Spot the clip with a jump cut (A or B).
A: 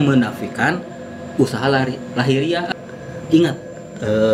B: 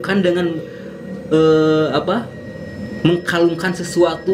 A